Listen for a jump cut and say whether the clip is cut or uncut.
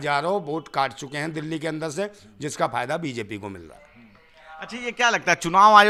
uncut